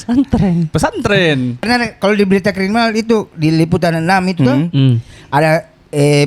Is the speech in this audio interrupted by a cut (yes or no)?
yes